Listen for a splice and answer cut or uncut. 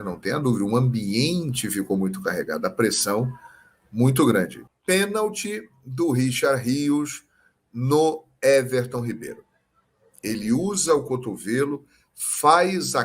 cut